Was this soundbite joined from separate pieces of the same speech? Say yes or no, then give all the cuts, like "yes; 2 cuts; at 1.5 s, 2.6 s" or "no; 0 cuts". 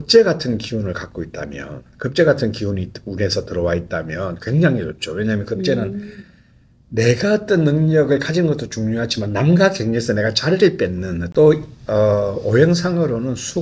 yes; 1 cut; at 11.3 s